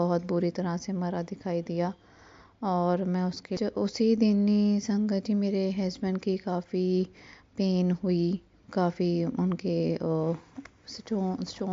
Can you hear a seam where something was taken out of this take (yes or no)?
yes